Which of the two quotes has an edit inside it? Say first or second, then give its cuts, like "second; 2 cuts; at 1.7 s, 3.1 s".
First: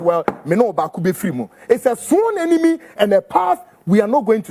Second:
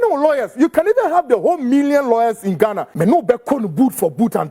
second; 1 cut; at 2.8 s